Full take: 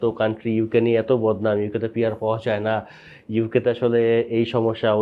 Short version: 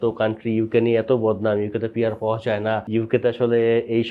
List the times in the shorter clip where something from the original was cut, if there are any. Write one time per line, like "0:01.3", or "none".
0:02.8